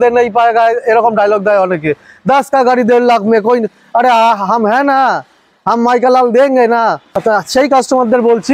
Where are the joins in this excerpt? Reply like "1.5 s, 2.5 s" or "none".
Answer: 7.1 s